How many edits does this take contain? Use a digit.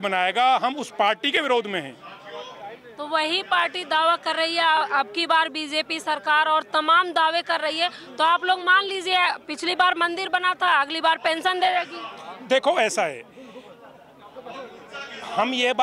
0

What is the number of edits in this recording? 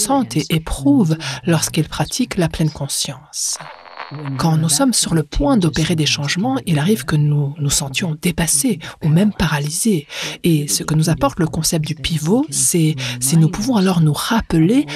1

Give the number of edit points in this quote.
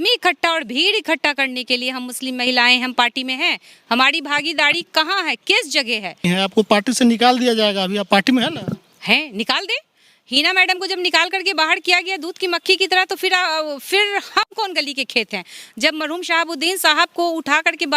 1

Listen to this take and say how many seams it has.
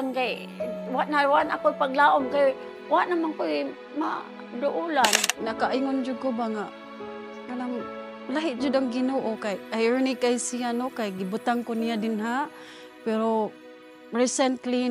1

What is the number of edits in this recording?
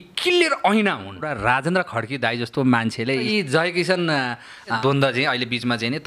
3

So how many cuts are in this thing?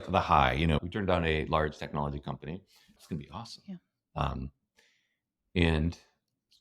1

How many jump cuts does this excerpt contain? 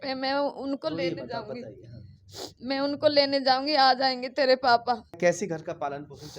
1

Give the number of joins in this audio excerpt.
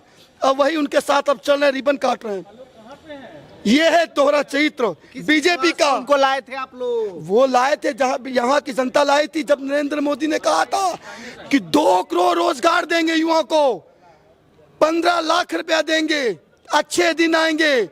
0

